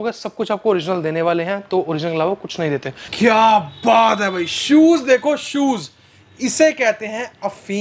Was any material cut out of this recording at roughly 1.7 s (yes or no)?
no